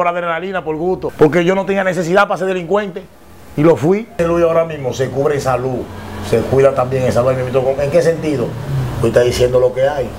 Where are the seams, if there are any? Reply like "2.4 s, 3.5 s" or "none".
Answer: 1.1 s, 4.1 s